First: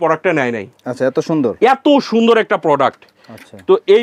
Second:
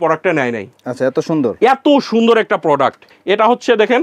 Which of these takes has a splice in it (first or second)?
second